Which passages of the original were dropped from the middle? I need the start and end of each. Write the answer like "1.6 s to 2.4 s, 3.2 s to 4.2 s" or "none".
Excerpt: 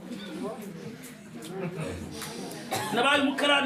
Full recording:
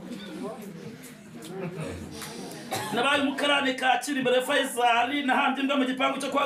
none